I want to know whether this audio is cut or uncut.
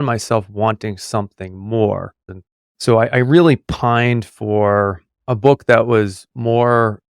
cut